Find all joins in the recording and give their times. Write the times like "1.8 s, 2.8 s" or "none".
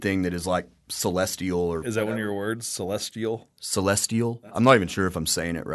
1.8 s